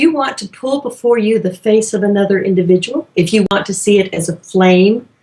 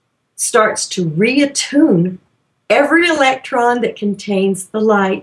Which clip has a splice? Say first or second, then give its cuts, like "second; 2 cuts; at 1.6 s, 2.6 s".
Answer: first; 1 cut; at 1.3 s